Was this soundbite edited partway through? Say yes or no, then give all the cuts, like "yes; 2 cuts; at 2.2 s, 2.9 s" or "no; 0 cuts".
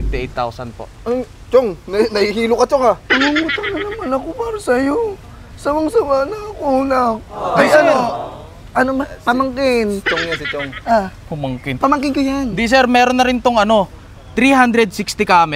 no; 0 cuts